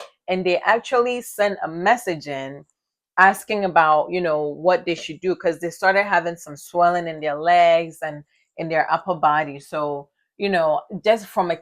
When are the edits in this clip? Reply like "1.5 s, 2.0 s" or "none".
none